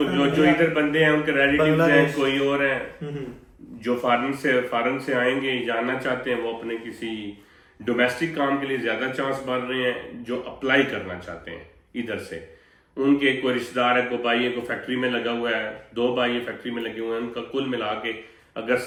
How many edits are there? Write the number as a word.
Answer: zero